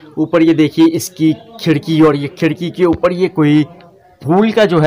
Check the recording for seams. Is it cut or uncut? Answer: uncut